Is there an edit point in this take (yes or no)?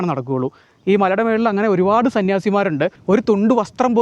yes